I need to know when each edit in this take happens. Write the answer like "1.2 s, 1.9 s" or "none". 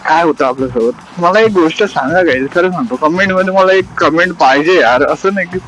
1.1 s